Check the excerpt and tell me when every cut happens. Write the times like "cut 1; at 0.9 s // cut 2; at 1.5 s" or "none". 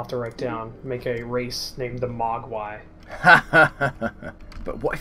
none